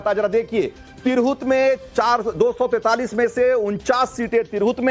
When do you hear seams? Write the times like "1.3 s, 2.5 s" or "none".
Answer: 2.8 s